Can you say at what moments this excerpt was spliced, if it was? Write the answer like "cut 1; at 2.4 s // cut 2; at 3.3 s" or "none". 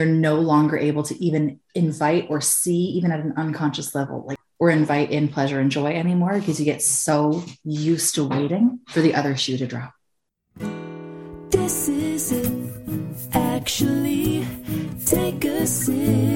cut 1; at 10.5 s